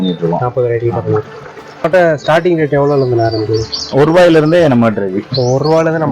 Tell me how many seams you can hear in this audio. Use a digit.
1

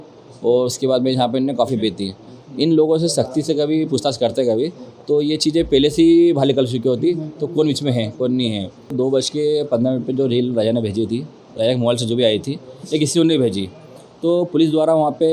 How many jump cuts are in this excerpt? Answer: 1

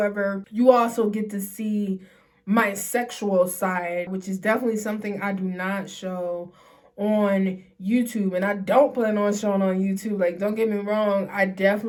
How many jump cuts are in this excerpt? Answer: 0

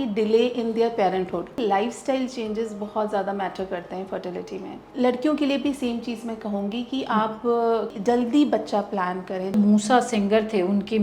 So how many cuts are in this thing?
4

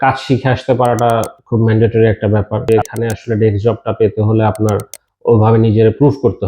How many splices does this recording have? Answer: 1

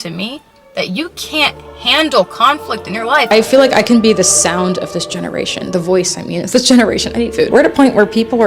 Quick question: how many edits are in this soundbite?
2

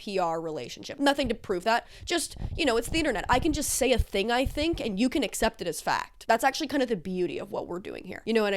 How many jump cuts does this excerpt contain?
1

